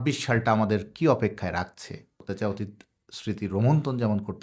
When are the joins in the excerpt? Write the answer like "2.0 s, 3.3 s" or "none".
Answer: 2.2 s